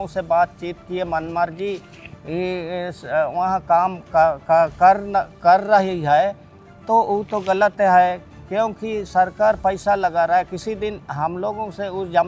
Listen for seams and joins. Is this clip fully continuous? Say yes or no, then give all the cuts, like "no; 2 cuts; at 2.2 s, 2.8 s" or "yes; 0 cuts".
yes; 0 cuts